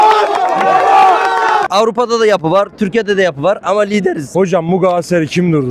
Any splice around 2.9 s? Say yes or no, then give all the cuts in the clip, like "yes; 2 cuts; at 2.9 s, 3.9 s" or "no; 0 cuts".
no; 2 cuts; at 1.7 s, 4.3 s